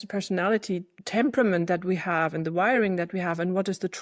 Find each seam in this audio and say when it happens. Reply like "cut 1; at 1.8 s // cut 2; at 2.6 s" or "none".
cut 1; at 1.0 s